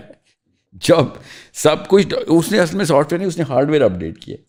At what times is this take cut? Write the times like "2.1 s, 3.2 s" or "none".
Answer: none